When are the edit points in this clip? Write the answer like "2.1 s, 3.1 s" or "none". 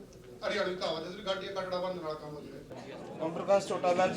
2.8 s